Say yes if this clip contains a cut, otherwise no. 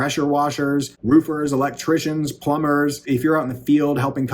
yes